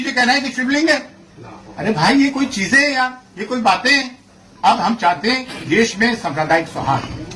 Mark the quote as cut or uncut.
uncut